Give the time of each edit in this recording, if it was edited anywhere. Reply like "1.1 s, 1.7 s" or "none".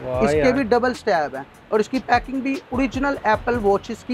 none

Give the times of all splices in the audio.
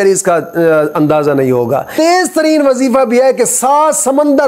1.9 s

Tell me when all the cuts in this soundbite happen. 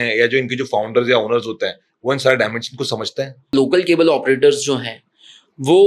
3.5 s

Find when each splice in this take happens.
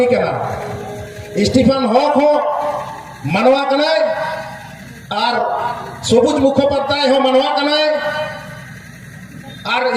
none

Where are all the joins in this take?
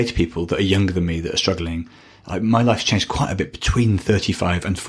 none

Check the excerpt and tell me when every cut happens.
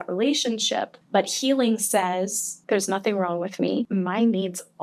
1.0 s, 2.5 s, 3.9 s

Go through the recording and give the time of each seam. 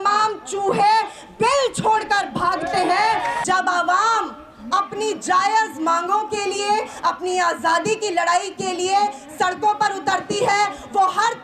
3.4 s

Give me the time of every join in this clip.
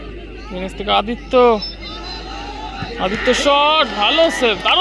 none

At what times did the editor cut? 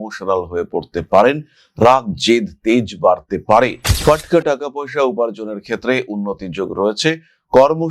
3.9 s

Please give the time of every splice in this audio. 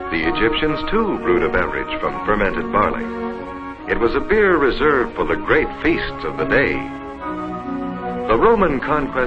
none

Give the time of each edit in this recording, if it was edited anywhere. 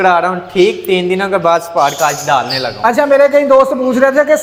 none

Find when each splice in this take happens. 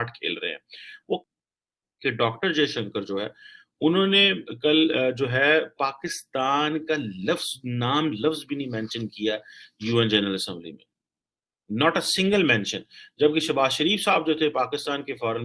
1.3 s

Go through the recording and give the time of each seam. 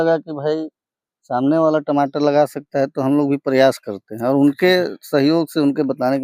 none

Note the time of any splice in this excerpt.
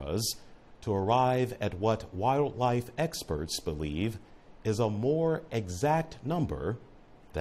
5.9 s

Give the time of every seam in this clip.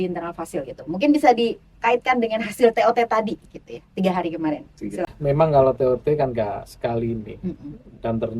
5.1 s

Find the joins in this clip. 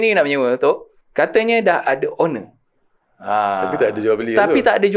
1.0 s

